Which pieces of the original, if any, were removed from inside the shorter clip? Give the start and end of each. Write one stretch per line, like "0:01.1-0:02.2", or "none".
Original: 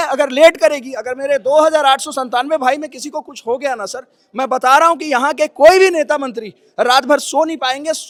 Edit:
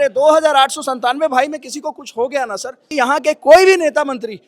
0:04.2-0:05.0